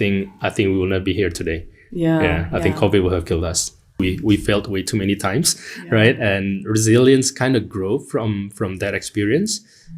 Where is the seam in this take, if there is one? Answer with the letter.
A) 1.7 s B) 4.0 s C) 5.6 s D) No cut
B